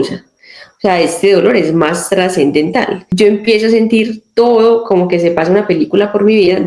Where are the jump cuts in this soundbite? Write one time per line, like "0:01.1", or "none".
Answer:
0:03.0